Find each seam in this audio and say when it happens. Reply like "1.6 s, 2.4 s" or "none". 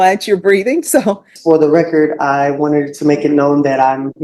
1.3 s

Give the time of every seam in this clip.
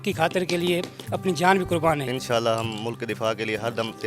2.1 s

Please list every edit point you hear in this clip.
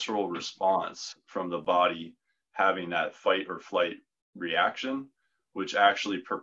none

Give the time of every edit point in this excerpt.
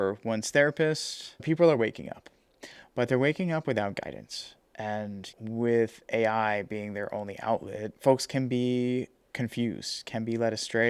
1.4 s, 5.3 s

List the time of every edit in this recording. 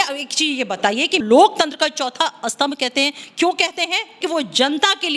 1.2 s, 4.2 s

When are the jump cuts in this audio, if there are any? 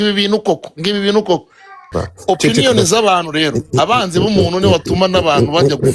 2.0 s

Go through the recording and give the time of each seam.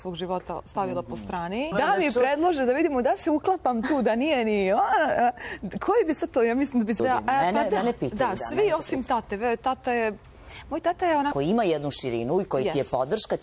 1.7 s, 7.0 s, 11.3 s

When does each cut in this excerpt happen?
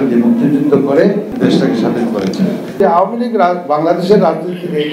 1.3 s, 2.8 s

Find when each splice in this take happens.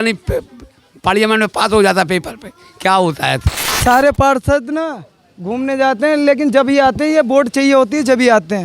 3.8 s

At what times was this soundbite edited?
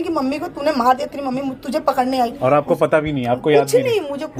none

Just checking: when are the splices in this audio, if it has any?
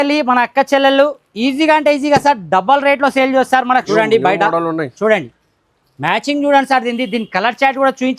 3.9 s

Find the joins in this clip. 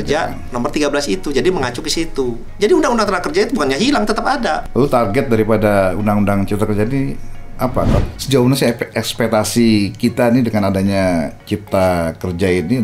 4.6 s, 7.9 s

